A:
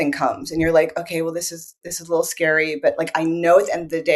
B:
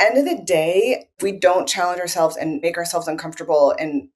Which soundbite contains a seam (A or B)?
B